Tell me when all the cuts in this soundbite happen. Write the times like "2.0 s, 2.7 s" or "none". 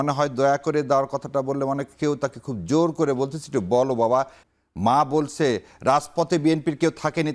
4.4 s